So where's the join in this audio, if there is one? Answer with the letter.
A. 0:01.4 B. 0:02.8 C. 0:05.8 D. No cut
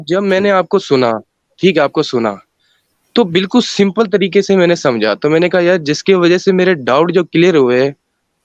D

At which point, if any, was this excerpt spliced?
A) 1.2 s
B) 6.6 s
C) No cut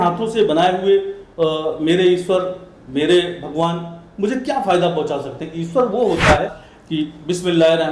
B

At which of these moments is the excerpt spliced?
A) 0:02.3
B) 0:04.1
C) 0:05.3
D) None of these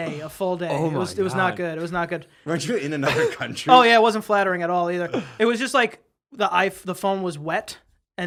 D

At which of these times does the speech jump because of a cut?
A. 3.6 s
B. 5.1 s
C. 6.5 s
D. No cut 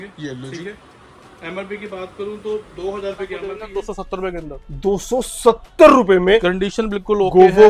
A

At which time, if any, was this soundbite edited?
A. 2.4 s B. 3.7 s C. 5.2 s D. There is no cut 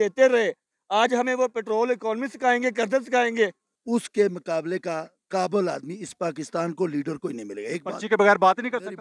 B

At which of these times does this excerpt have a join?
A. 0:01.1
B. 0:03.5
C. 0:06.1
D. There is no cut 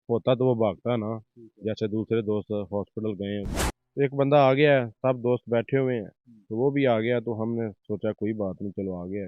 B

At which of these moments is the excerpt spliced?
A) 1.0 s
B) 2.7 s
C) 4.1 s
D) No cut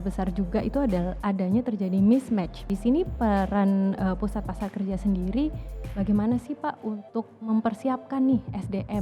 B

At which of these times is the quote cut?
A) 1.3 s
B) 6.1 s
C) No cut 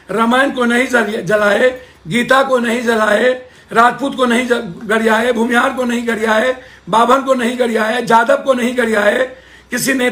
C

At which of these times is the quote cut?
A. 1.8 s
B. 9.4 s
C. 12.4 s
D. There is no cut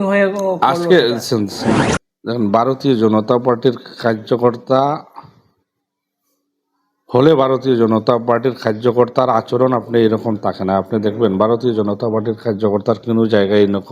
A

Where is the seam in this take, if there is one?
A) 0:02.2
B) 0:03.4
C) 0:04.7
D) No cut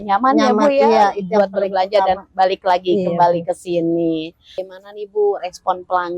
C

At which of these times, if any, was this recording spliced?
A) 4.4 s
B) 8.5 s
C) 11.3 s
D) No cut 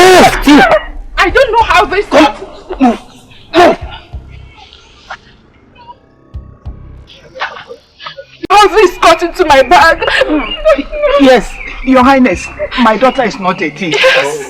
B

